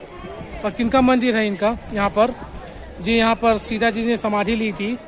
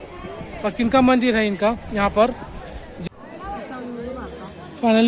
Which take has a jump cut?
second; 1 cut; at 2.9 s

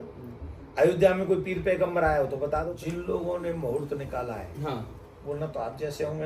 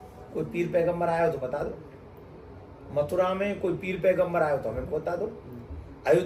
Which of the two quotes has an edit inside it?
first; 1 cut; at 2.7 s

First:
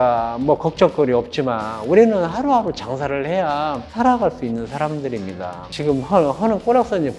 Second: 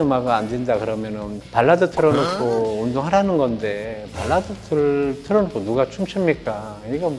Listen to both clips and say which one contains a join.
first; 2 cuts; at 3.8 s, 5.6 s

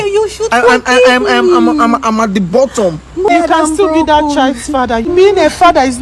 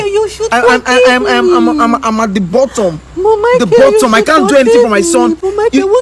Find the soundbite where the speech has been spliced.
first; 2 cuts; at 3.3 s, 5.1 s

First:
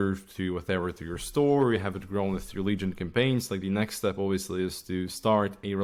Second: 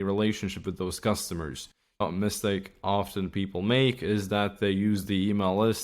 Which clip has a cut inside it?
second; 1 cut; at 2.0 s

